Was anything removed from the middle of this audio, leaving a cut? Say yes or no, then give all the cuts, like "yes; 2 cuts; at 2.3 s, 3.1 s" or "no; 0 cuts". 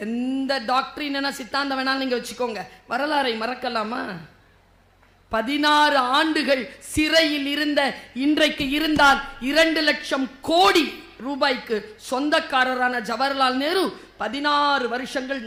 no; 0 cuts